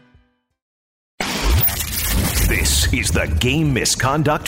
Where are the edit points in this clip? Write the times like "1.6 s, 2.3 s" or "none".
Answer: 1.1 s